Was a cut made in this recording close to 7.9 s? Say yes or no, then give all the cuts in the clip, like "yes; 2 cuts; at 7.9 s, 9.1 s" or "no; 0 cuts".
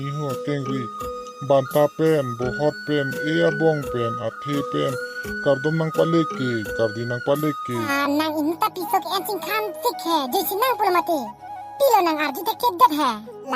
yes; 1 cut; at 7.9 s